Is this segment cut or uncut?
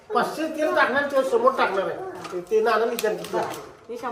uncut